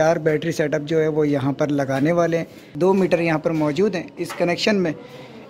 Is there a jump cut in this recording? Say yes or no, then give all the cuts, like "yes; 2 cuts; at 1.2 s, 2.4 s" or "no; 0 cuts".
yes; 1 cut; at 2.6 s